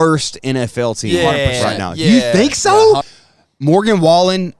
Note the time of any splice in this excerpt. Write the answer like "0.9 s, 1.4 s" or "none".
3.1 s